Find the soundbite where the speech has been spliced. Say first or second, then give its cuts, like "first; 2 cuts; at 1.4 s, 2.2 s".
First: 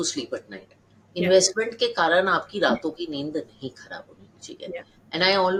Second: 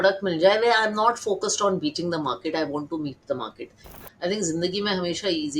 second; 1 cut; at 3.9 s